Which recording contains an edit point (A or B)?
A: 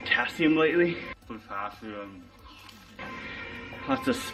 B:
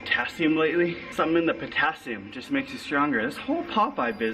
B